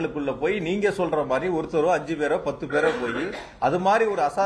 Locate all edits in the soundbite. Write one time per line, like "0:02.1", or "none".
none